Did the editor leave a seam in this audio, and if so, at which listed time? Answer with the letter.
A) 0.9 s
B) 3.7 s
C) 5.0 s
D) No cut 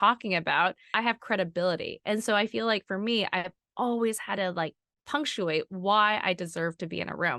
A